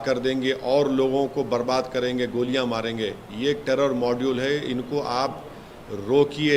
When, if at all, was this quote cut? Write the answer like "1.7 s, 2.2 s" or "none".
none